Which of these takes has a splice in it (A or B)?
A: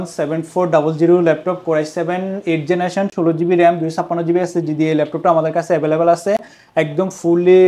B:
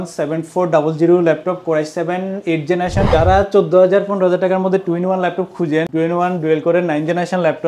B